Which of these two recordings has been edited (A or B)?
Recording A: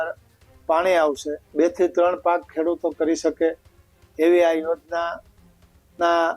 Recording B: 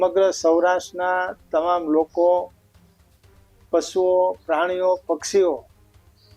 A